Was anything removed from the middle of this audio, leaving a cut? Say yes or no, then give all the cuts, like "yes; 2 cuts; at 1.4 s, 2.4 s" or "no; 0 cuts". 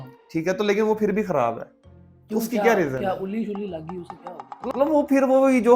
yes; 1 cut; at 4.7 s